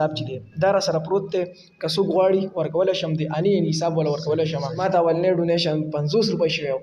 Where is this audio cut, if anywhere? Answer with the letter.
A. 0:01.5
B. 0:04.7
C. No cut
B